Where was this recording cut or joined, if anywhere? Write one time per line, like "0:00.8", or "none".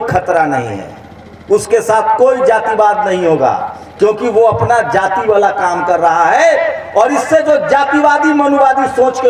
none

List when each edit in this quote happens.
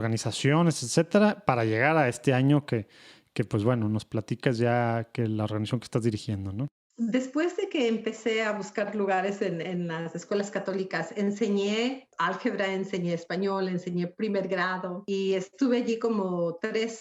0:06.8
0:12.1
0:15.0

